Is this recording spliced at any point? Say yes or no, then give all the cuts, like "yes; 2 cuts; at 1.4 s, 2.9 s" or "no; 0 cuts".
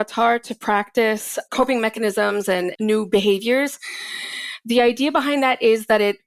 yes; 2 cuts; at 1.4 s, 2.7 s